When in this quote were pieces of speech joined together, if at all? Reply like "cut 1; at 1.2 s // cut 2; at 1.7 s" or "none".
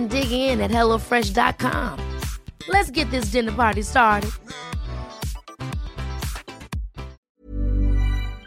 cut 1; at 7.2 s

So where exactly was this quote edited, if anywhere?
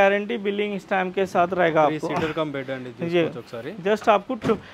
none

